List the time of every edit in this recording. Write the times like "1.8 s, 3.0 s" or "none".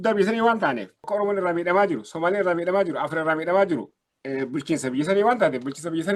1.0 s